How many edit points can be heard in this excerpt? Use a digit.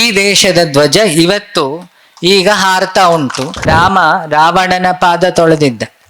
1